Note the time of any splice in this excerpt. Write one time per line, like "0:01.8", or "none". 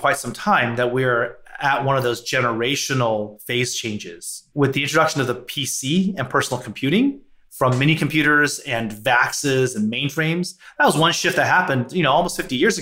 0:04.5